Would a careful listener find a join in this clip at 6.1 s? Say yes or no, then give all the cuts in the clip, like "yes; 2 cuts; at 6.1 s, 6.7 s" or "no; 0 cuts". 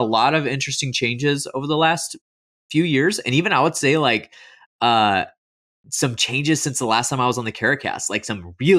no; 0 cuts